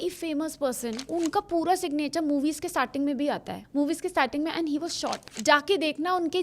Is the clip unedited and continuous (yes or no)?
no